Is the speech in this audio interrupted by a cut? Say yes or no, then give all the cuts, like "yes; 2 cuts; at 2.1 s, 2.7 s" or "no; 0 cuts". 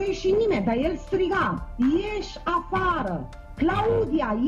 no; 0 cuts